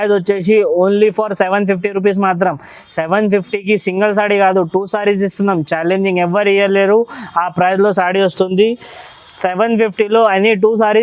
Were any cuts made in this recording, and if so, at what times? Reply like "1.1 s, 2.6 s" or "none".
none